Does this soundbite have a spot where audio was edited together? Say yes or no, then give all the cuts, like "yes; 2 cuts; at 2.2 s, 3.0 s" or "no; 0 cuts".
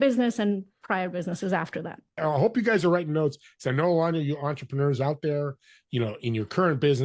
yes; 1 cut; at 2.2 s